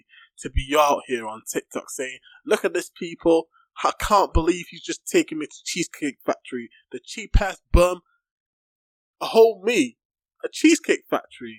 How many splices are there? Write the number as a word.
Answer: zero